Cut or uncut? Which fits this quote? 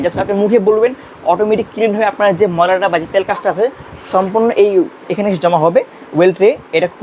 uncut